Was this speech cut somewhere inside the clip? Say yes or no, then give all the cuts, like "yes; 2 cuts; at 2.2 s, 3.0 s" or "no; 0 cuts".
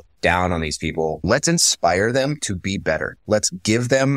yes; 1 cut; at 1.2 s